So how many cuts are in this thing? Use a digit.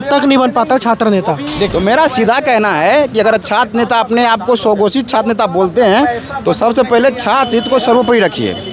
1